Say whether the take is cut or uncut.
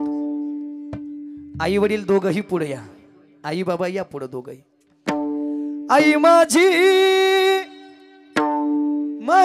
uncut